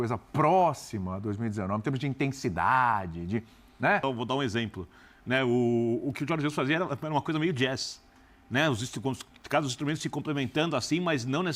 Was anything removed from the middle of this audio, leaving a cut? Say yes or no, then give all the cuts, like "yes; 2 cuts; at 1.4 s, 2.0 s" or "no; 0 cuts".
yes; 1 cut; at 4.0 s